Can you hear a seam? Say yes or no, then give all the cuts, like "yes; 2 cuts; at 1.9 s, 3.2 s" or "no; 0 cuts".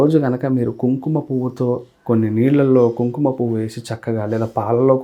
no; 0 cuts